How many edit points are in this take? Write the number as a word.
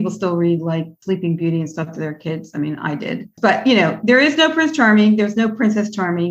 one